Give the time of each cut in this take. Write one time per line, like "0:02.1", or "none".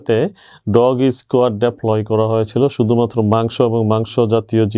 none